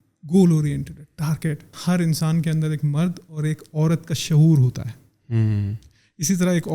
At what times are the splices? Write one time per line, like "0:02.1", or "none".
0:01.7